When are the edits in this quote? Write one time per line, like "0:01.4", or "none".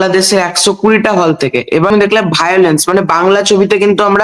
0:01.9